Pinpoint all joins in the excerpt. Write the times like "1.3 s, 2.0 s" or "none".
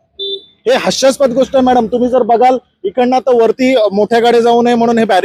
none